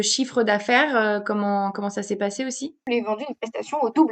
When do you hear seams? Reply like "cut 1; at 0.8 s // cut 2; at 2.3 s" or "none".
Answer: cut 1; at 2.7 s